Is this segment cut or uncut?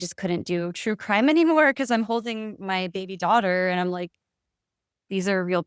uncut